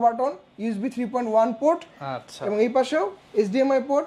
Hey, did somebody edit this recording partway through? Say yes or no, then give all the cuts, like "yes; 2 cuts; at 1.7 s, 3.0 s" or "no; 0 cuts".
no; 0 cuts